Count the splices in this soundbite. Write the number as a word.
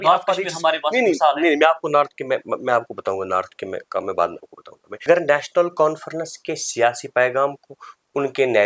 one